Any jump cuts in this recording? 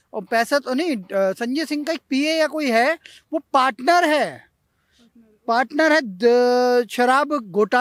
no; 0 cuts

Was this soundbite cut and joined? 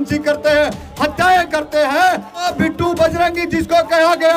yes; 1 cut; at 2.4 s

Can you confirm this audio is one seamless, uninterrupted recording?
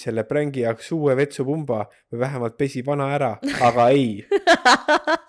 yes; 0 cuts

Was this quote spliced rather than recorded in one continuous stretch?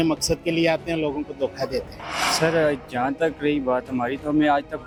no; 0 cuts

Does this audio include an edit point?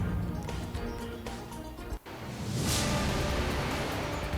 yes; 2 cuts; at 1.2 s, 2.0 s

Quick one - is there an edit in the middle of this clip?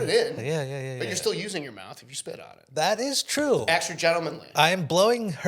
yes; 1 cut; at 4.4 s

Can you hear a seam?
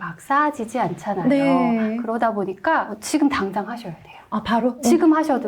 no; 0 cuts

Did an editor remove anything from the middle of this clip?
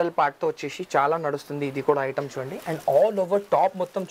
no; 0 cuts

